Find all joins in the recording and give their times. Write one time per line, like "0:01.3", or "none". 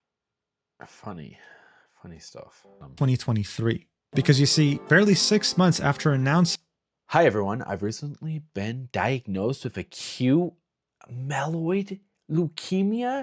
0:02.7

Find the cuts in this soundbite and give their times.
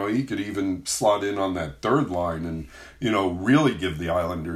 none

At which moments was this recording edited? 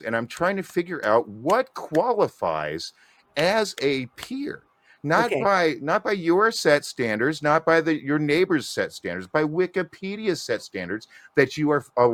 none

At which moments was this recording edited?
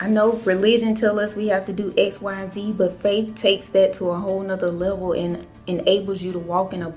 none

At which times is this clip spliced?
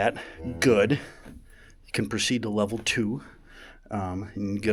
none

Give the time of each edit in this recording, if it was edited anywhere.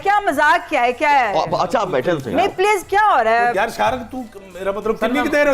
0:03.5

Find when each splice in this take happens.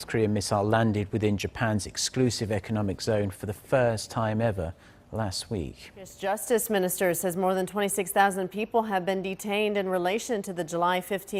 none

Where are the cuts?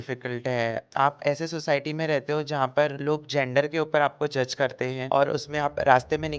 0:00.8
0:03.0
0:05.0

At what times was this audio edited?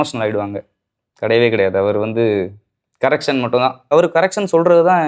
0:03.9

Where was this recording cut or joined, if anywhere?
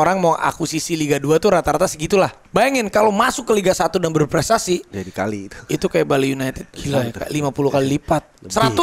0:02.4
0:06.7

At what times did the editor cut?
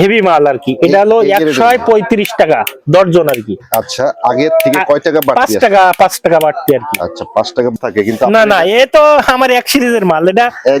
0:07.8

